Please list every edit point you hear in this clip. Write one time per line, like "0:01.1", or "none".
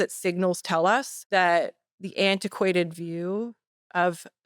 0:01.1